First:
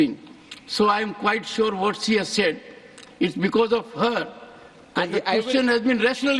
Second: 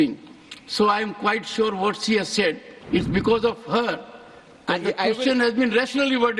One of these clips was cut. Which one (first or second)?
second